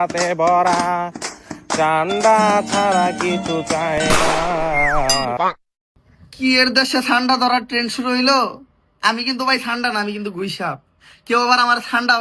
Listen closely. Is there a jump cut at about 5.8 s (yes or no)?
yes